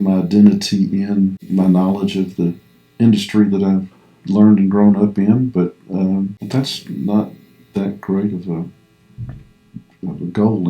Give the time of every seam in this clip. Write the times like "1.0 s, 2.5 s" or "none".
1.4 s, 6.4 s

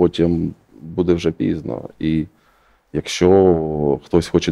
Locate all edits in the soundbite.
none

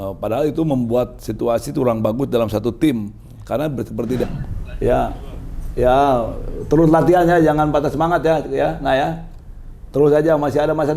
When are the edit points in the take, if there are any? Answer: 4.2 s

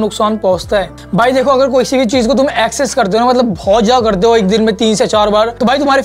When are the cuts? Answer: none

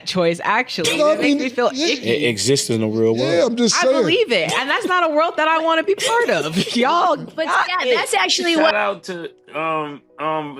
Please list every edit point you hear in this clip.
8.7 s

